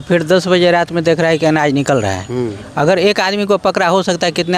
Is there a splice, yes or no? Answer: no